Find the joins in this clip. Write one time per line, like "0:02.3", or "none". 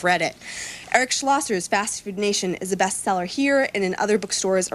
0:01.6